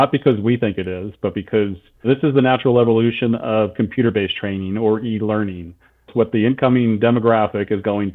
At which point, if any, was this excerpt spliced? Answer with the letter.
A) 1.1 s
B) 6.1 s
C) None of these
B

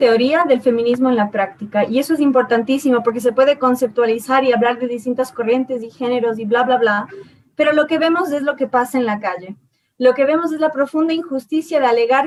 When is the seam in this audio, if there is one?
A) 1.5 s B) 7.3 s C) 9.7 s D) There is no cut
D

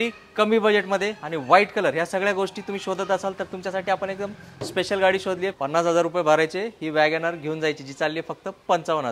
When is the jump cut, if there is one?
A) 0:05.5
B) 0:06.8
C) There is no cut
A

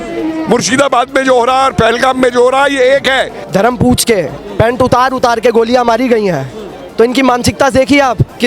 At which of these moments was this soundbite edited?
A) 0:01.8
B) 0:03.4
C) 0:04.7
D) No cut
B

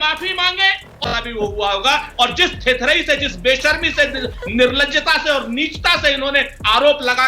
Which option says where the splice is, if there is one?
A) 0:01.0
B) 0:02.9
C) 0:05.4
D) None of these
A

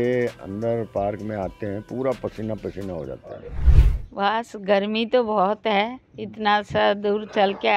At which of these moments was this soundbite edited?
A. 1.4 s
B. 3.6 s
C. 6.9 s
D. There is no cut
B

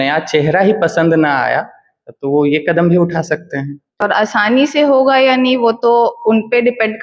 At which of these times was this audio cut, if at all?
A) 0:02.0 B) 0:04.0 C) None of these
B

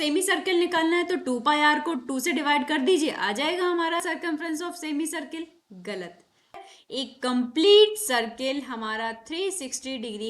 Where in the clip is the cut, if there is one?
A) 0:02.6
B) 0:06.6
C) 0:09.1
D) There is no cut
B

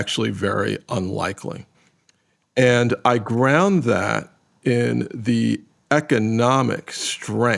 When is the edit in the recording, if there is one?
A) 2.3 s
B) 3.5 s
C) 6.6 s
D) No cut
D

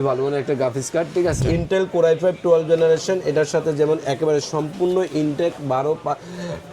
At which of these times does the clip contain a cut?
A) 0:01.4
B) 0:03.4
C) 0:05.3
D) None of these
A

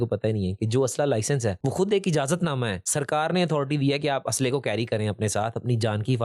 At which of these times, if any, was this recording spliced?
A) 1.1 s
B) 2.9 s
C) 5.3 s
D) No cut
B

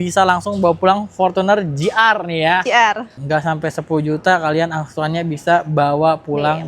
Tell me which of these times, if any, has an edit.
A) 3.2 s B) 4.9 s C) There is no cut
A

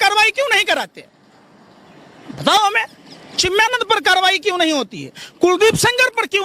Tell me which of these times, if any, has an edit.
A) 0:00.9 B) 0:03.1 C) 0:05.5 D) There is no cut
D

